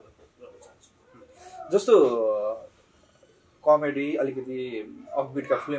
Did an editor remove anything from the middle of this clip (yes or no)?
no